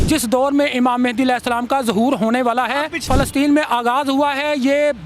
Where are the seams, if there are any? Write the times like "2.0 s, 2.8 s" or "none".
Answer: 3.1 s